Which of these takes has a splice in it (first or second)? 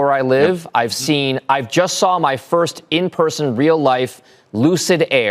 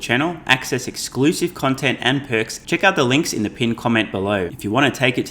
second